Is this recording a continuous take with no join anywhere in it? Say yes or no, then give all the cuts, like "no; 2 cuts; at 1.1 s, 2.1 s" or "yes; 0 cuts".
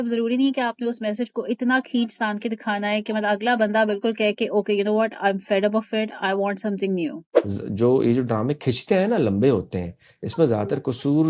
no; 1 cut; at 7.3 s